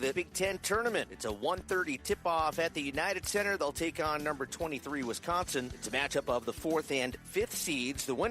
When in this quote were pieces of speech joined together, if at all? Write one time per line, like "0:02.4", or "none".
none